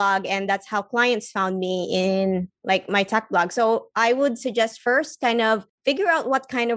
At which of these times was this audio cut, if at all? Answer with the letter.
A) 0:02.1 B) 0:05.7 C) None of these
B